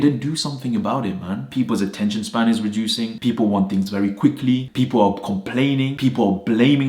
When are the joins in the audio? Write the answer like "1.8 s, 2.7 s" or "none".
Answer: 1.5 s, 3.1 s, 4.7 s, 5.9 s